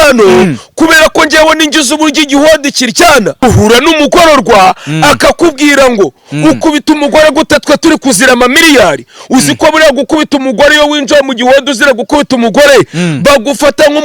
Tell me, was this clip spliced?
yes; 1 cut; at 3.4 s

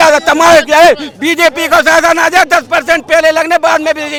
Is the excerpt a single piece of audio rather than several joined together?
yes; 0 cuts

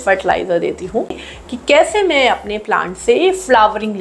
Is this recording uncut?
no; 1 cut; at 1.2 s

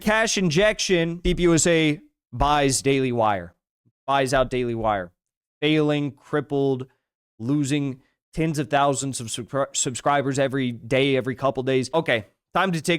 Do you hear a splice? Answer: yes; 2 cuts; at 1.2 s, 11.9 s

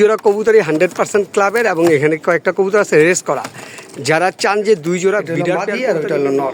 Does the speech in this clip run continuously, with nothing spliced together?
no; 1 cut; at 5.6 s

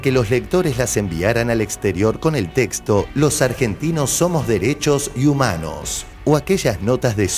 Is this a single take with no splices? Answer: yes; 0 cuts

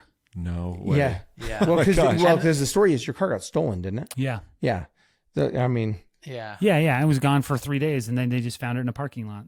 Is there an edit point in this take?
no; 0 cuts

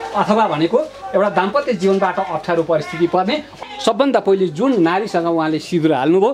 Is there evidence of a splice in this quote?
yes; 1 cut; at 3.6 s

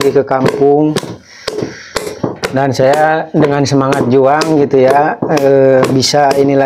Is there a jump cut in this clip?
no; 0 cuts

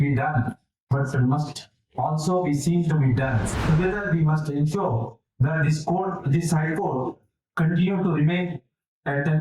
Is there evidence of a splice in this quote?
yes; 1 cut; at 3.5 s

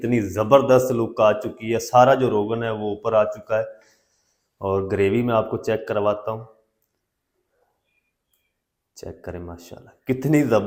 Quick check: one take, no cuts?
yes; 0 cuts

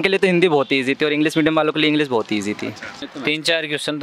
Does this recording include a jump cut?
yes; 1 cut; at 3.1 s

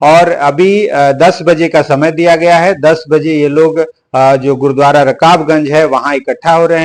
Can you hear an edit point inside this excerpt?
no; 0 cuts

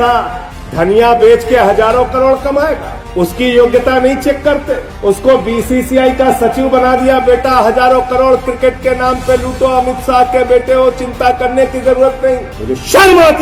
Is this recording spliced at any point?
yes; 1 cut; at 12.5 s

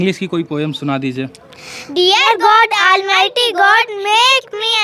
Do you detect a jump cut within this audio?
no; 0 cuts

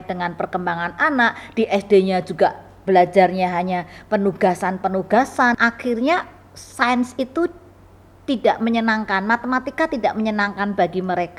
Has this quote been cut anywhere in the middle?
yes; 1 cut; at 5.5 s

